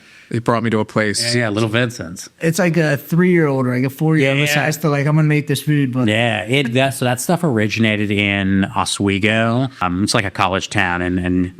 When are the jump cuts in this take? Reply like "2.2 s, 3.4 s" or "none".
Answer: 9.8 s